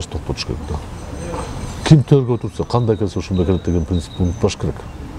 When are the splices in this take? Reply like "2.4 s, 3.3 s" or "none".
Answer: none

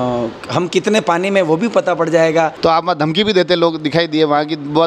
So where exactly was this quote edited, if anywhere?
2.5 s

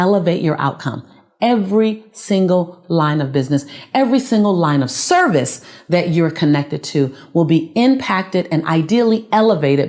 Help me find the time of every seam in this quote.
none

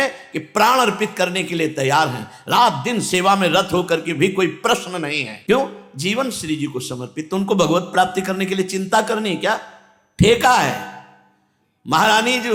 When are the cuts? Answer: none

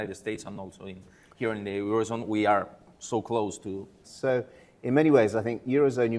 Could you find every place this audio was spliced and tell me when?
4.0 s

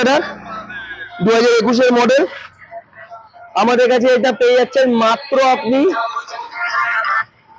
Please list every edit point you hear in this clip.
none

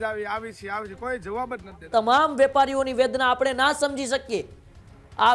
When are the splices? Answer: 1.9 s

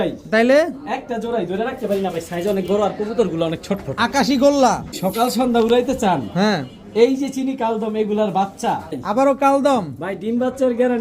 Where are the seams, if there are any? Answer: 5.0 s, 9.0 s

